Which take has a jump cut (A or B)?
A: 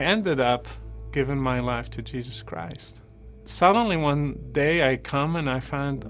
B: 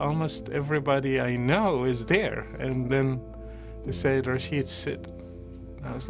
A